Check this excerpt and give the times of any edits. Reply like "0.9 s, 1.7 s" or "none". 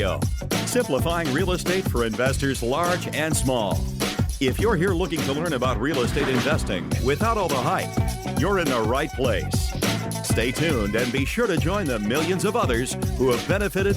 none